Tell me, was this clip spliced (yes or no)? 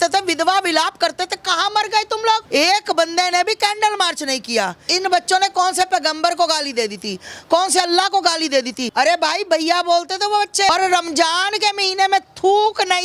yes